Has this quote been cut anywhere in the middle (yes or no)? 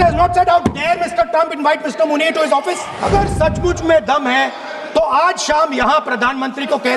yes